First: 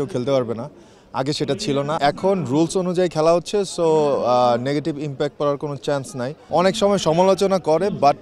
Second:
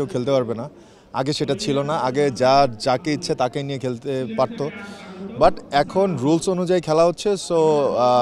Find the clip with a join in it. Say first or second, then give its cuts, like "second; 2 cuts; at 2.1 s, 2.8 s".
first; 2 cuts; at 2.0 s, 6.3 s